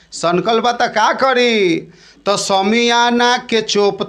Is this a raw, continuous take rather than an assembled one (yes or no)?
yes